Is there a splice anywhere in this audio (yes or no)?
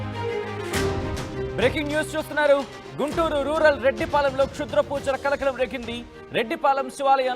yes